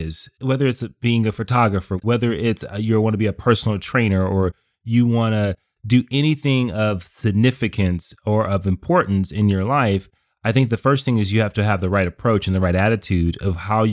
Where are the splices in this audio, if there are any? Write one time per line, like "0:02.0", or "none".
0:01.9